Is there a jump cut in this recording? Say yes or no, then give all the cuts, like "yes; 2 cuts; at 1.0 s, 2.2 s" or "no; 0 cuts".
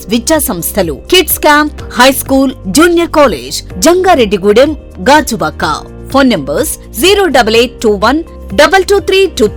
no; 0 cuts